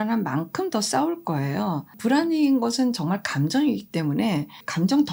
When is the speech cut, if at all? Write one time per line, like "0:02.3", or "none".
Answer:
none